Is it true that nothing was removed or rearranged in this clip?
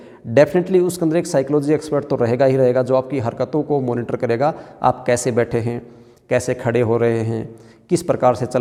yes; 0 cuts

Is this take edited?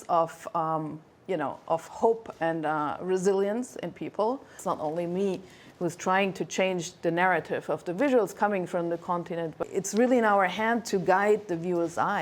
yes; 2 cuts; at 4.6 s, 9.6 s

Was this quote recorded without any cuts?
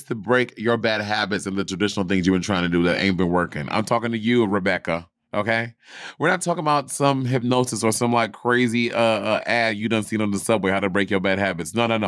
yes; 0 cuts

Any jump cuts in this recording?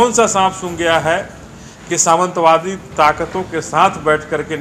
no; 0 cuts

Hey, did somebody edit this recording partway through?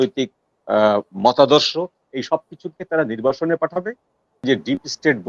yes; 1 cut; at 4.4 s

